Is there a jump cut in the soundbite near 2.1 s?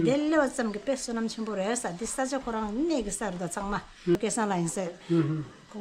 no; 1 cut; at 4.2 s

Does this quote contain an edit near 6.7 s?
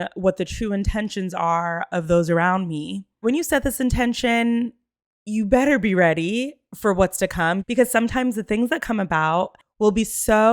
no; 2 cuts; at 3.2 s, 9.6 s

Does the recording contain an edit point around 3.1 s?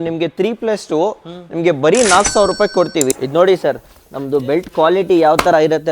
yes; 1 cut; at 3.1 s

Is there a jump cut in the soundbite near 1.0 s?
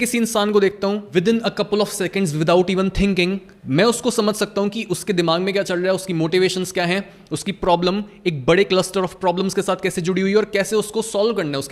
yes; 2 cuts; at 1.0 s, 3.5 s

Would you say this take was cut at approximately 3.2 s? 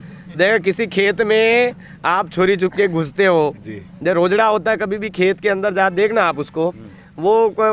no; 0 cuts

